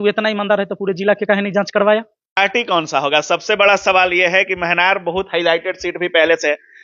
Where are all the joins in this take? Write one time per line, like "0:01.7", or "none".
0:02.4